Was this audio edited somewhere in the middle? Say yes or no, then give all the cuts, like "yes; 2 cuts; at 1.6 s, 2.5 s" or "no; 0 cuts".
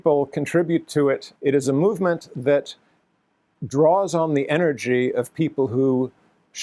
yes; 1 cut; at 1.3 s